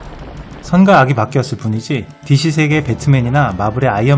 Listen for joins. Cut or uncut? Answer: uncut